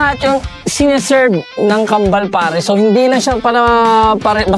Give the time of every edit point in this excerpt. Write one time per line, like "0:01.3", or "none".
none